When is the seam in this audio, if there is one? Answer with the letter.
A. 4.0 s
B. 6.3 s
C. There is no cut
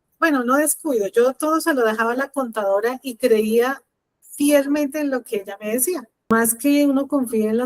B